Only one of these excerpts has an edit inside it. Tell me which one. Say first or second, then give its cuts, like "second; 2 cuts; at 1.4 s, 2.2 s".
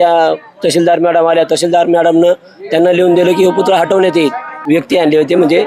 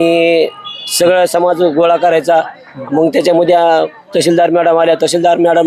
first; 1 cut; at 4.5 s